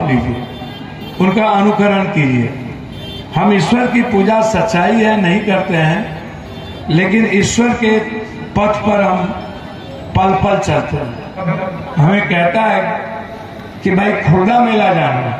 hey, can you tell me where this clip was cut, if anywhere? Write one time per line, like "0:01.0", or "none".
0:11.5